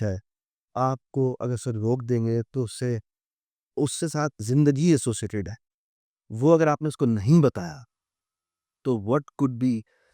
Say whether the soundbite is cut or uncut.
uncut